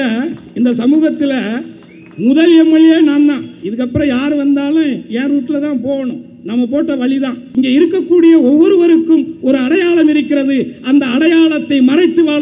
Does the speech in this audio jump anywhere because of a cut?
yes; 2 cuts; at 3.6 s, 7.4 s

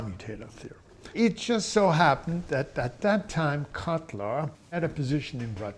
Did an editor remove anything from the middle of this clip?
yes; 1 cut; at 4.8 s

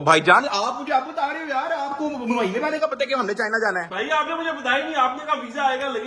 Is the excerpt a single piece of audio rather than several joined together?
yes; 0 cuts

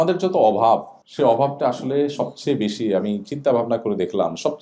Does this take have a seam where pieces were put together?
yes; 1 cut; at 1.0 s

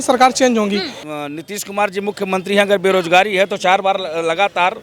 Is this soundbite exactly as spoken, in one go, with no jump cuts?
no; 1 cut; at 1.0 s

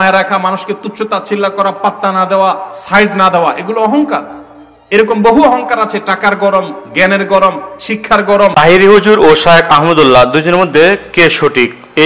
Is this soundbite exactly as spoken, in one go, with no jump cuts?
no; 1 cut; at 8.5 s

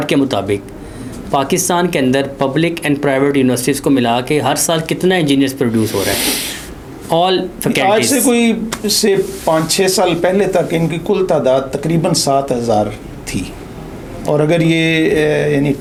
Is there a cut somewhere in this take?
no; 0 cuts

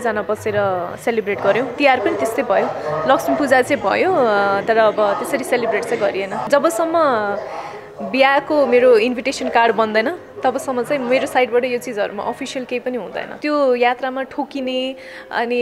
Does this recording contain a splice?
yes; 2 cuts; at 6.4 s, 13.4 s

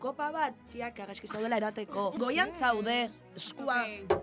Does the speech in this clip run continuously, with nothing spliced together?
no; 1 cut; at 2.1 s

